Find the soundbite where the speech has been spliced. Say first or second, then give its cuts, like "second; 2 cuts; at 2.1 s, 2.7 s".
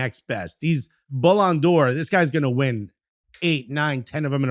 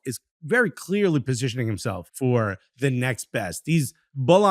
second; 1 cut; at 2.0 s